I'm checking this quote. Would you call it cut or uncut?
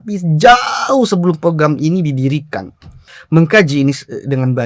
cut